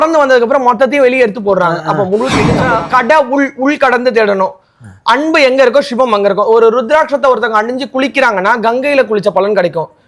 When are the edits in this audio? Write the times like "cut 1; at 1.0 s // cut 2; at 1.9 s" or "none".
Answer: cut 1; at 2.5 s